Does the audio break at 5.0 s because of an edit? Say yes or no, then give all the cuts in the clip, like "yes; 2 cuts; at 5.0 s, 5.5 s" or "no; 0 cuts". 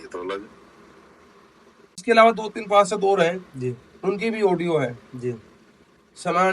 no; 1 cut; at 2.0 s